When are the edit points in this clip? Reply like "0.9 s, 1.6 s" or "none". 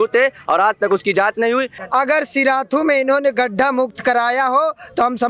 1.7 s

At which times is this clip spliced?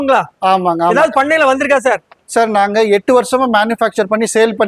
none

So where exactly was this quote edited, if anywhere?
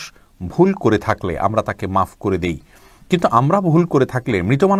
none

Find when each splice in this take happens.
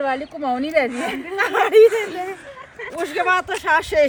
none

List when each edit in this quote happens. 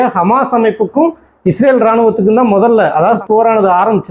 3.2 s

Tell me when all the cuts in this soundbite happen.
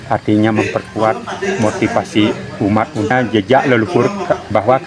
3.1 s

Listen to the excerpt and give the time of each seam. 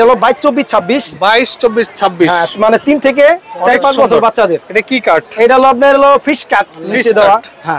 none

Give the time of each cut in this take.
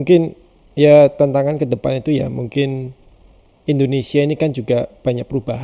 none

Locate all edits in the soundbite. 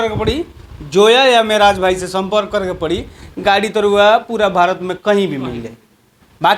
none

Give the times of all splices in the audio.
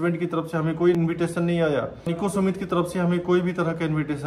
0.9 s, 2.1 s

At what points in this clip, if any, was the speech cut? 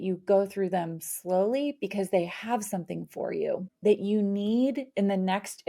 3.7 s

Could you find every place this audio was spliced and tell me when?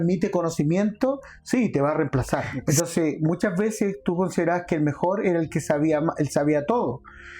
2.5 s

